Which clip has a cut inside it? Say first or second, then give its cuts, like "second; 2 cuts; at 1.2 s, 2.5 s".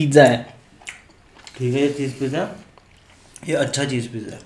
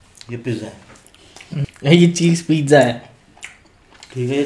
second; 1 cut; at 1.6 s